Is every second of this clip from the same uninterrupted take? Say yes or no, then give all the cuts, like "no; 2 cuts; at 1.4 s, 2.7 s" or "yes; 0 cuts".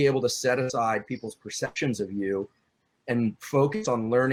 yes; 0 cuts